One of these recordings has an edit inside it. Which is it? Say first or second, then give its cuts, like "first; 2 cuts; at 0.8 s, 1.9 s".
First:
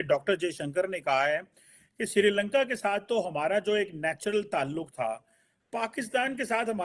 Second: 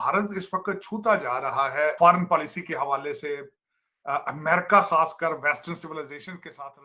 second; 1 cut; at 2.0 s